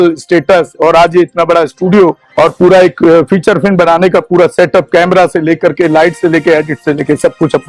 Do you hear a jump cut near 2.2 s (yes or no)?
yes